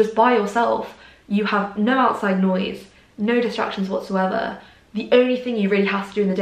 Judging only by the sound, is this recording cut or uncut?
uncut